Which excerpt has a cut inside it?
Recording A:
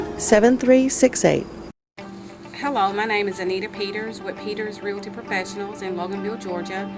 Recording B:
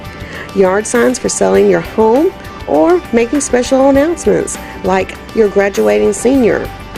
A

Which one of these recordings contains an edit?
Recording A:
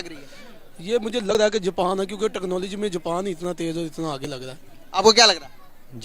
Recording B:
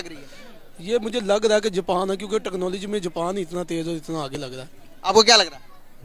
A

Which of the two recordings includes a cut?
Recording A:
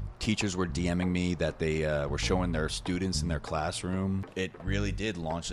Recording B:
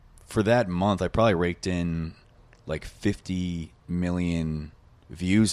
A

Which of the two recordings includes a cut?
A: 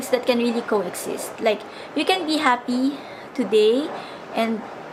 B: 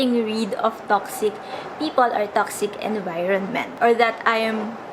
B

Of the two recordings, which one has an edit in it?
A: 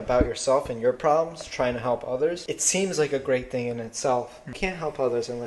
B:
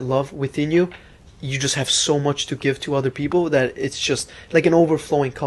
A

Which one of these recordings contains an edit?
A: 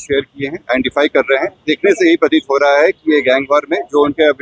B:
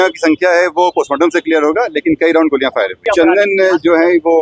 B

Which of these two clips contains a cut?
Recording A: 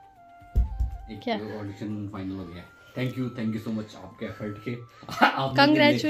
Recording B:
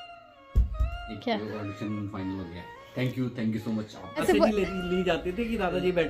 B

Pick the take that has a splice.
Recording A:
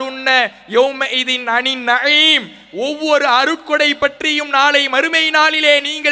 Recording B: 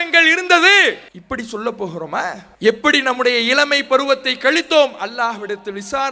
B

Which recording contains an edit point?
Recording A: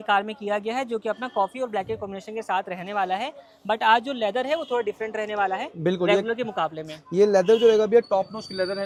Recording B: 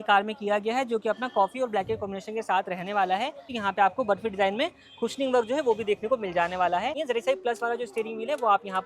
B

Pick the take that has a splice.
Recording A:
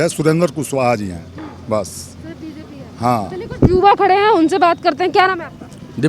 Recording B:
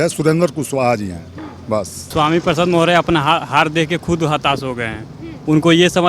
B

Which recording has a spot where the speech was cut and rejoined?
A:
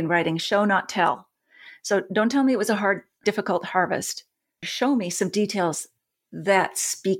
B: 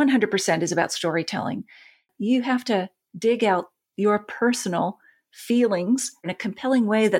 B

